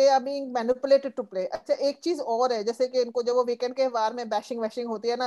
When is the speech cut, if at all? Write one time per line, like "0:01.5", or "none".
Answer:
0:01.6